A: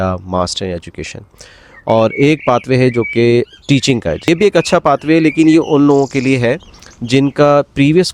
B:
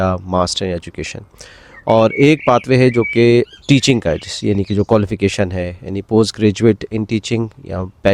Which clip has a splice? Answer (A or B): A